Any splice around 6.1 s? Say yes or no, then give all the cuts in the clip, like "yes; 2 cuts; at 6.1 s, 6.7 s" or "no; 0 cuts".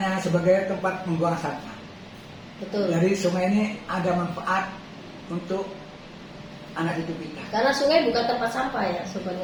no; 0 cuts